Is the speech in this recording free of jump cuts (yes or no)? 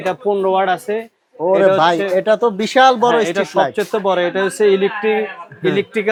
yes